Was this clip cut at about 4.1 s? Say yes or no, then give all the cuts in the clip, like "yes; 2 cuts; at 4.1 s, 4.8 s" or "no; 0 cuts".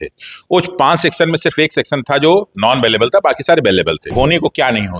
yes; 1 cut; at 4.1 s